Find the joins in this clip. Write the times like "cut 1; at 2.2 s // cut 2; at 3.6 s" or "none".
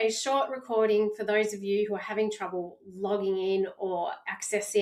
none